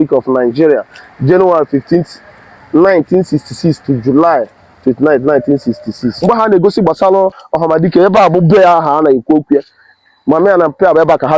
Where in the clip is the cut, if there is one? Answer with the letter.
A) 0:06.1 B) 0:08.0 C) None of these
A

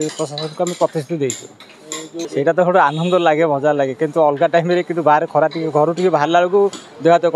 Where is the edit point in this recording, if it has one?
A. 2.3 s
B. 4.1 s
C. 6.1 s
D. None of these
A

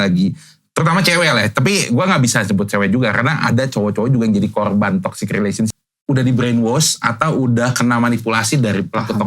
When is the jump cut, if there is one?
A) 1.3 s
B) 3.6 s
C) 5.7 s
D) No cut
C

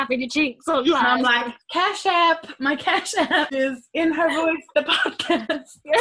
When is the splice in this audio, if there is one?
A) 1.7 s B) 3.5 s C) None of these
B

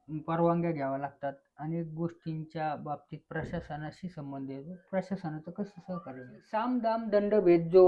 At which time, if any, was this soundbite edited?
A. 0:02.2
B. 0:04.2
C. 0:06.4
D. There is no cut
C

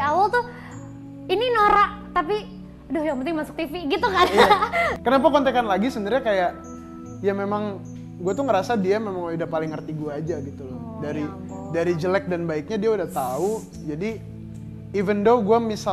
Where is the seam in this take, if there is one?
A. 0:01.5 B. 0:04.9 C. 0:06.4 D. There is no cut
B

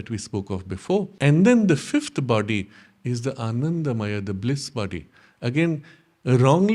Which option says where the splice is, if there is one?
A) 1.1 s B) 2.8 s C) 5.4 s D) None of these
A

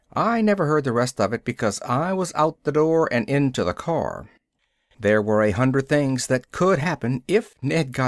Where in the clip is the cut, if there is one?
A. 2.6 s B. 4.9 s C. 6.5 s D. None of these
B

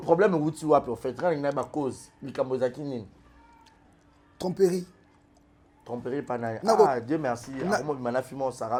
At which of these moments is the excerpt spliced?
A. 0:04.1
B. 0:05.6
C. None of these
C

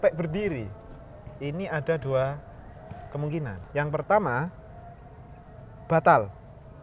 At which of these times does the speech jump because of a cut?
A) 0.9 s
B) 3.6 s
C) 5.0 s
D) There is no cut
B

